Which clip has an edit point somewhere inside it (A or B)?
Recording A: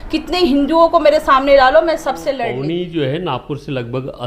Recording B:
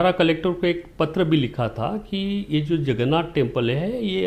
A